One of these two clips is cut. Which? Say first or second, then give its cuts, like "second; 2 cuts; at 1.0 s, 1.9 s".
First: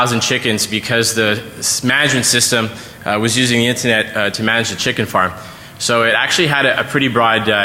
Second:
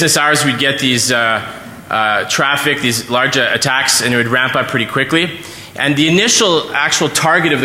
first; 1 cut; at 4.7 s